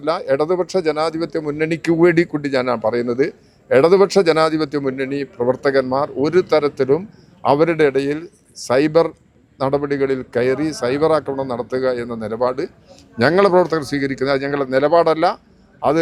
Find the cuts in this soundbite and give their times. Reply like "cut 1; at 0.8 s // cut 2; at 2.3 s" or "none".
none